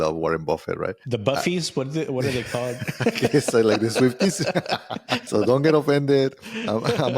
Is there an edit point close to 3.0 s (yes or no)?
no